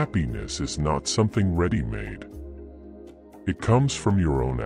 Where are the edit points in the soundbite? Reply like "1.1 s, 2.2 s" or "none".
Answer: 2.1 s, 3.4 s

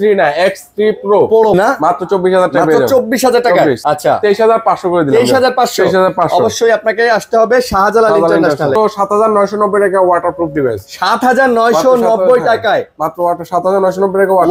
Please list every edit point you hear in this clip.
1.5 s, 3.8 s, 8.8 s

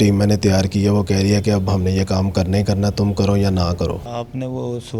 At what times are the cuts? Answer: 4.1 s

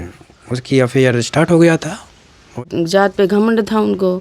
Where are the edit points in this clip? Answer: 2.6 s

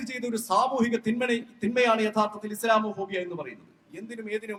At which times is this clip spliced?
none

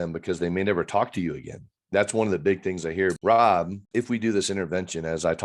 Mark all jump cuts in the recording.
3.2 s, 3.8 s

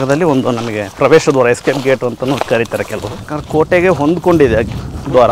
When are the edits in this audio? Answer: 3.2 s

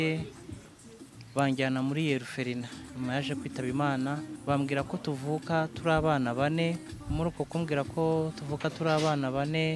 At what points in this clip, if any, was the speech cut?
4.3 s, 6.9 s

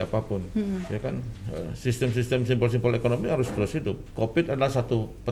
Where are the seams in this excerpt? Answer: 4.1 s

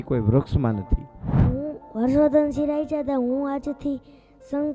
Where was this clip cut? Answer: 1.5 s

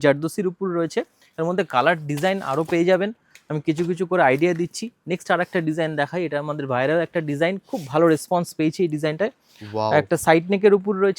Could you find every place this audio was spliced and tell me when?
none

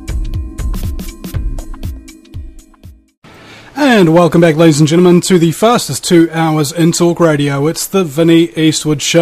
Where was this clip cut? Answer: none

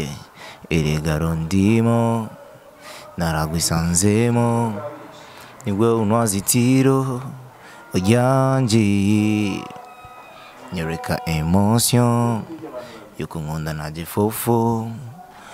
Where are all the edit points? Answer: none

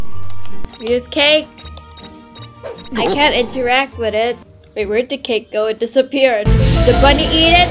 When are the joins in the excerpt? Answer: 3.1 s

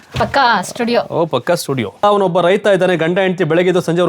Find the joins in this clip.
2.0 s

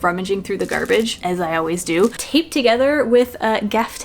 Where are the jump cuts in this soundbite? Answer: 2.2 s

